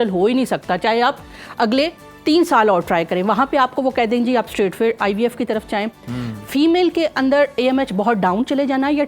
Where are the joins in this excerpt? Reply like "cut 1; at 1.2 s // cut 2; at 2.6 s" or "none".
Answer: none